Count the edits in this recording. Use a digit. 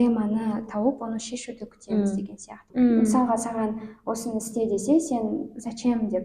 1